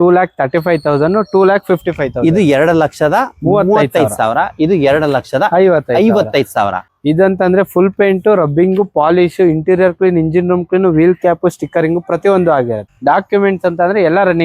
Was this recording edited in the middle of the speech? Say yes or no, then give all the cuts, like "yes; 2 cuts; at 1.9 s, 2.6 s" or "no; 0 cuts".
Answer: yes; 2 cuts; at 6.9 s, 12.9 s